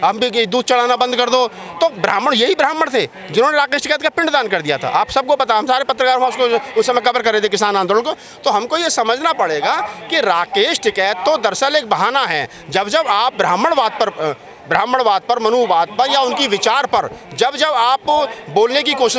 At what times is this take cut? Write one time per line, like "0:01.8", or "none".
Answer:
none